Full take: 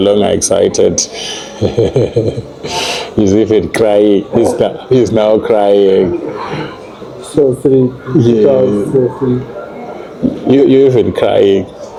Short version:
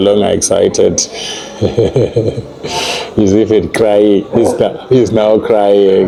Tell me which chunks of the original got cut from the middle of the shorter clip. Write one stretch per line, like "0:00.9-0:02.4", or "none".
none